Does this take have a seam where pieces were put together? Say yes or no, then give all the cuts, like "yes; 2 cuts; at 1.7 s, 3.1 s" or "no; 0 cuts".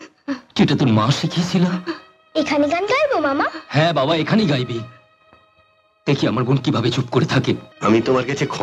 yes; 1 cut; at 7.7 s